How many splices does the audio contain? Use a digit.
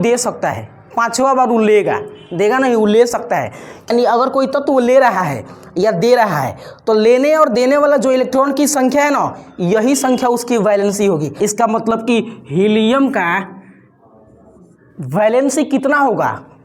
2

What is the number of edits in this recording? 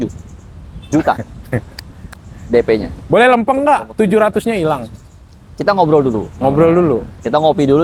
0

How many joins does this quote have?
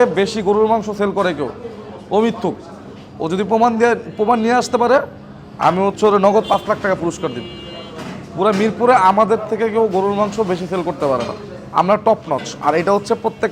0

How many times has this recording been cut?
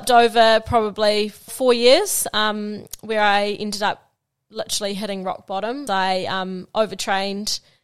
2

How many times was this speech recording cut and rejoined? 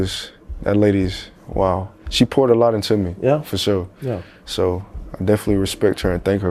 0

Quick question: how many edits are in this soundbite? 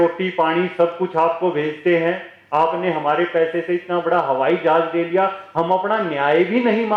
0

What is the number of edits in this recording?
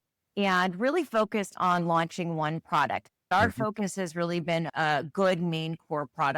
1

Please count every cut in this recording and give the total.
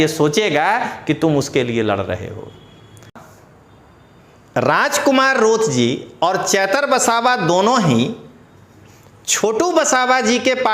1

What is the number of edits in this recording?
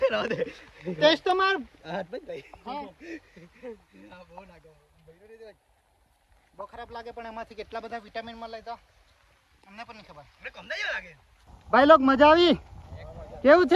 1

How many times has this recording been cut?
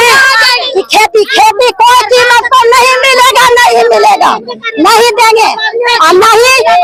0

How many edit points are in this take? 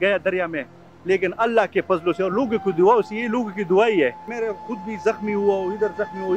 1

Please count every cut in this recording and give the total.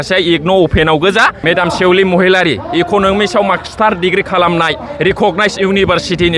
1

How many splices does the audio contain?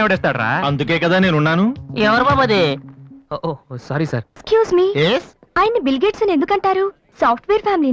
1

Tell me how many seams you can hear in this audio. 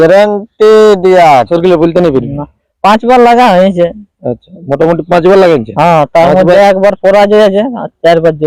1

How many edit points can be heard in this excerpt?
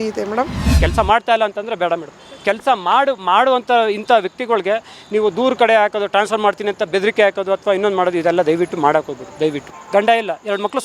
2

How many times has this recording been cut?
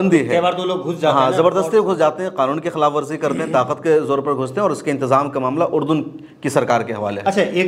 0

